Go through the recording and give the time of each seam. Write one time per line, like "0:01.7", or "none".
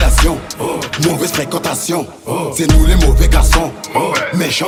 none